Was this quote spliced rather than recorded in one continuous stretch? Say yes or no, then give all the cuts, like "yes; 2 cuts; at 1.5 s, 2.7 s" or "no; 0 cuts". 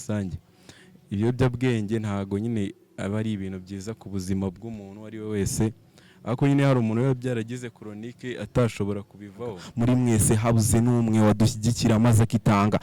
yes; 1 cut; at 9.6 s